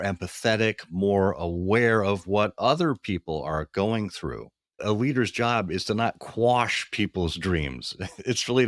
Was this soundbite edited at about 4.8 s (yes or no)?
yes